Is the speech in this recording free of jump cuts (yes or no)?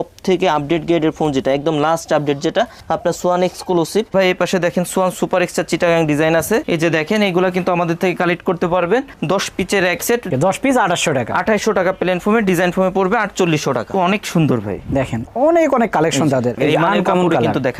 no